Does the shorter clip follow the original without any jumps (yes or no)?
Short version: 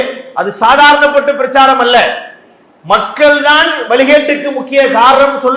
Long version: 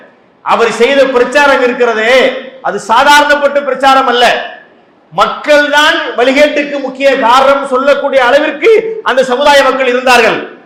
yes